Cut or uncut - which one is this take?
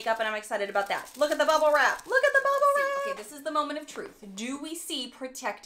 cut